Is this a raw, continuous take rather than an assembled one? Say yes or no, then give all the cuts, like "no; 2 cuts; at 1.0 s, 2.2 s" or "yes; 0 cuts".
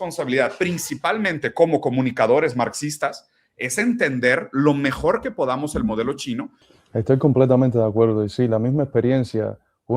no; 1 cut; at 6.6 s